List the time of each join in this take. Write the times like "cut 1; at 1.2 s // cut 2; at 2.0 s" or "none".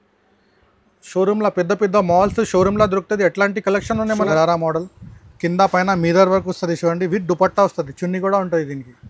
cut 1; at 4.2 s